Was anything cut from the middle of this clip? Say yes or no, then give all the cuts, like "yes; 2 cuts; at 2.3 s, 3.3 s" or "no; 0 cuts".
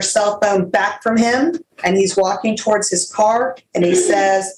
yes; 1 cut; at 1.7 s